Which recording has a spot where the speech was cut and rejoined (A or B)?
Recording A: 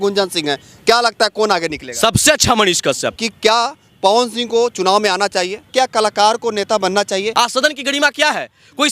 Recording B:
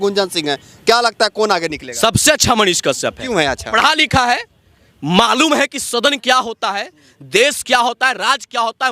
A